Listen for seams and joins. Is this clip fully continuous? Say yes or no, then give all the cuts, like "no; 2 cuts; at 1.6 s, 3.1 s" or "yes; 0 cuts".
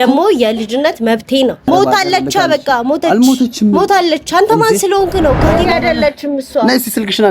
no; 2 cuts; at 1.6 s, 5.4 s